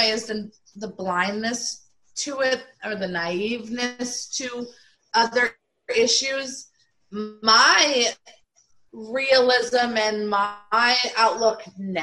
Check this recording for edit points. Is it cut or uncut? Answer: uncut